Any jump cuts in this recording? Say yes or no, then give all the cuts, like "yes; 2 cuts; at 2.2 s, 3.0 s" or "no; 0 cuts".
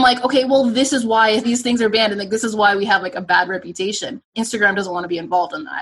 yes; 2 cuts; at 1.4 s, 4.3 s